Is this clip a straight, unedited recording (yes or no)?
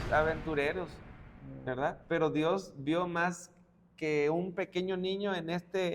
yes